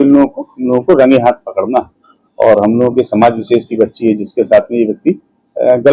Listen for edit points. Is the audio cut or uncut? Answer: uncut